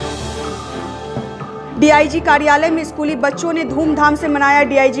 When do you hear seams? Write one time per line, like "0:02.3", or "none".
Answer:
0:01.4